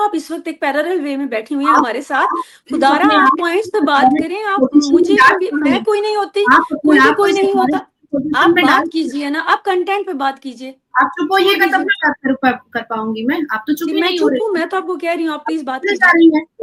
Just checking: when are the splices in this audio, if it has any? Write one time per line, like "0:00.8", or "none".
none